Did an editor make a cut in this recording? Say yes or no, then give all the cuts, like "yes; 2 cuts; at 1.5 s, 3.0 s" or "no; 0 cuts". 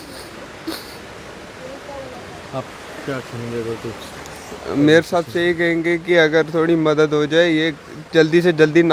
no; 0 cuts